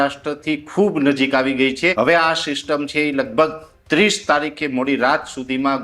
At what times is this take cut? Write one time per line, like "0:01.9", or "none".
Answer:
0:01.9